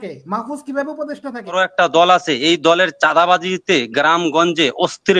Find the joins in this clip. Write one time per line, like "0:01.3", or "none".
0:01.6

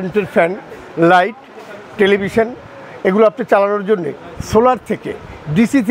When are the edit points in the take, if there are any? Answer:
none

